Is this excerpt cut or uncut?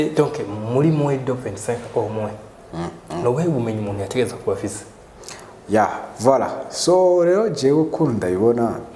uncut